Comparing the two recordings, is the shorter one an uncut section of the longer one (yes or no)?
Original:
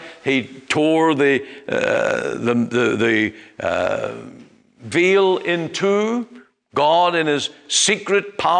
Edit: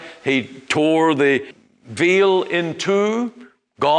no